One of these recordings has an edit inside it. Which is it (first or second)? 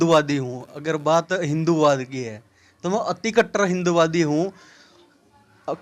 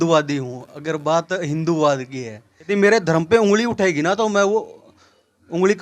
second